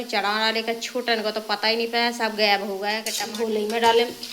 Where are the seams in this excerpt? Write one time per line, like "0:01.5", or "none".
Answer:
0:03.2